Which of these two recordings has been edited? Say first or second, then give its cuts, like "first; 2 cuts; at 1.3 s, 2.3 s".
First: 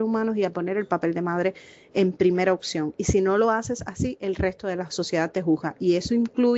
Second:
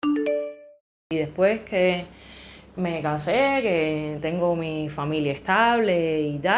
second; 1 cut; at 1.1 s